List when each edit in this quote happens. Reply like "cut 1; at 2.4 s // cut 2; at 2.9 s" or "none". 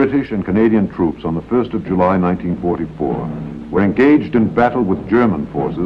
cut 1; at 2.9 s